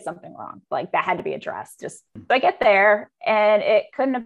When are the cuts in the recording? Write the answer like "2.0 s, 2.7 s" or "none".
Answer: 2.2 s